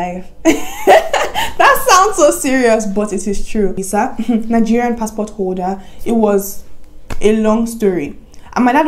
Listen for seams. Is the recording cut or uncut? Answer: cut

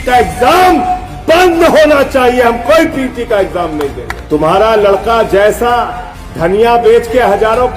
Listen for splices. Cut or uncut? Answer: cut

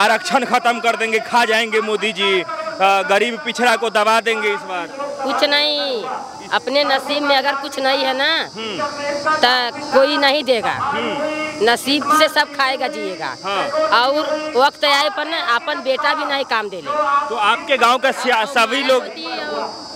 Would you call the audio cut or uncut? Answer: uncut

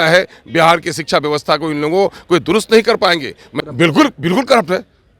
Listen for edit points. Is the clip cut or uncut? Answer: cut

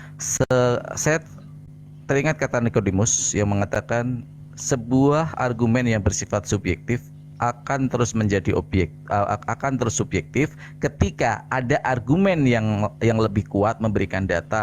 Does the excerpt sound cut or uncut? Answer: uncut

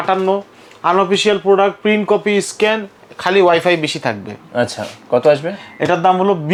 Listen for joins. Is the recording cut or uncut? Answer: uncut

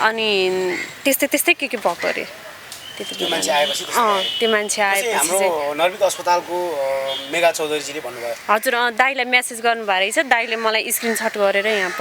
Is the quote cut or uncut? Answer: uncut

